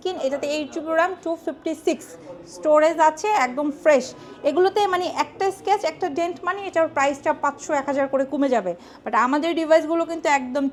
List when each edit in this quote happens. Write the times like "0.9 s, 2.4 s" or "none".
none